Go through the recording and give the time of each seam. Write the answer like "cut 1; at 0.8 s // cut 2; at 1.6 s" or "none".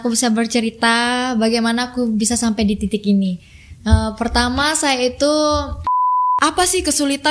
cut 1; at 6.0 s